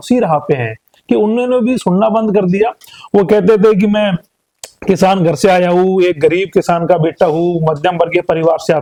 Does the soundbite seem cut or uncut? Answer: uncut